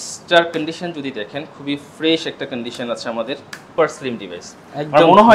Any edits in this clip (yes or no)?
yes